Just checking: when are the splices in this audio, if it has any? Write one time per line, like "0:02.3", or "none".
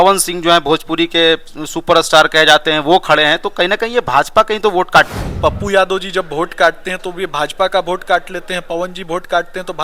0:05.1